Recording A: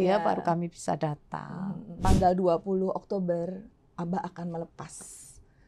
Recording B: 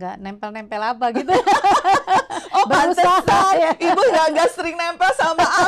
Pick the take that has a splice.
A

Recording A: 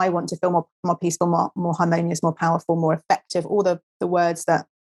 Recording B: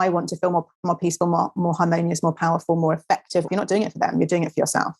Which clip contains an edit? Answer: B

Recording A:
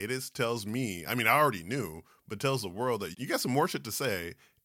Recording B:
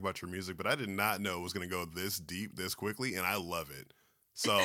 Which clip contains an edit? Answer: A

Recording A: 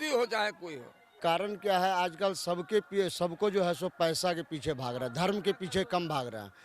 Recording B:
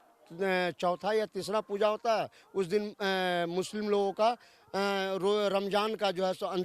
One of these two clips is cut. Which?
A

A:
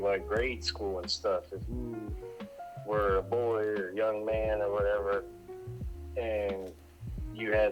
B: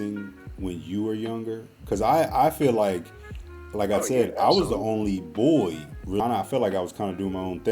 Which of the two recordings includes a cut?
B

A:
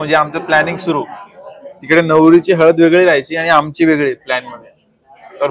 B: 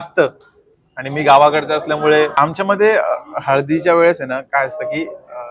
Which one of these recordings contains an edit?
B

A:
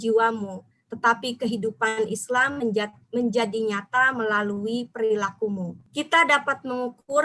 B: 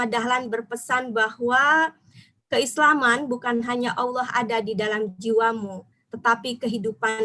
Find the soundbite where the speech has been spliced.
A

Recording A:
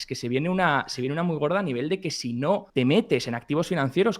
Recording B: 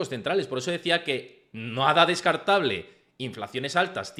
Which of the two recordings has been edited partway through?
A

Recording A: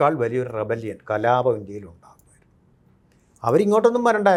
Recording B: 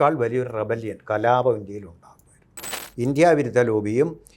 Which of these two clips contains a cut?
B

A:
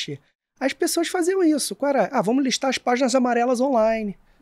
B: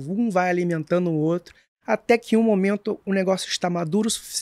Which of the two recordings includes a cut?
B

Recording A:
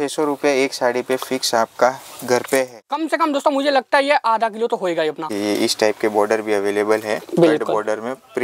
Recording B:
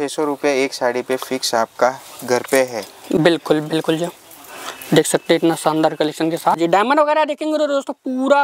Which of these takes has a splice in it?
A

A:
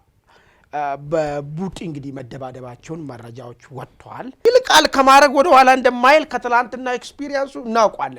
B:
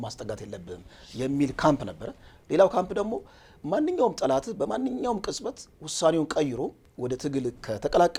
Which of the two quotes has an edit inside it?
A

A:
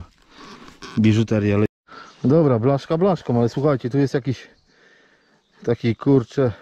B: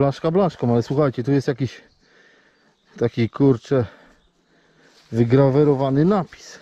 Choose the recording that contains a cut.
A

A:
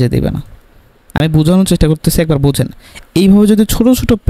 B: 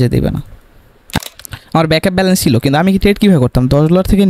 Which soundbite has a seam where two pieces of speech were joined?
B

